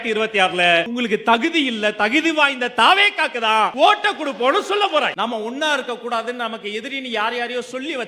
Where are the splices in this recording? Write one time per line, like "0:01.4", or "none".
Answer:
0:00.9
0:03.7
0:05.1